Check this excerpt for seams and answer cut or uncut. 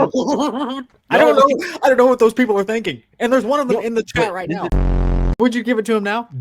cut